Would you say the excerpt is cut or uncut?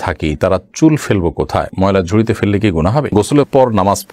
cut